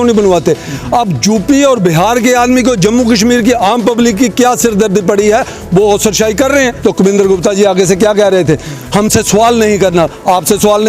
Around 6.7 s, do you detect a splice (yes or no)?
yes